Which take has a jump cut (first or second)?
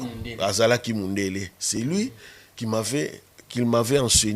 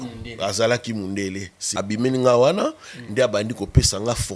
second